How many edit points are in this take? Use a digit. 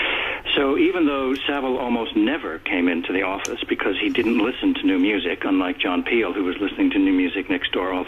1